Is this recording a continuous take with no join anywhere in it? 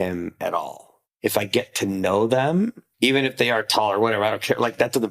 no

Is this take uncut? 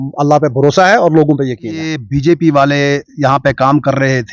no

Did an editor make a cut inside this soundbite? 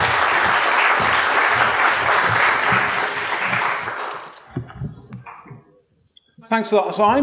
no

